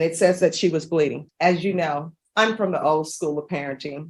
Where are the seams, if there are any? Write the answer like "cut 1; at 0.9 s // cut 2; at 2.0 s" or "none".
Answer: cut 1; at 1.2 s // cut 2; at 2.2 s